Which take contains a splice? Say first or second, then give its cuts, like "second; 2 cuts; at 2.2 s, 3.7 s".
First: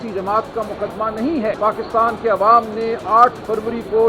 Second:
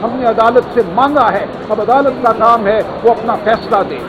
first; 1 cut; at 1.6 s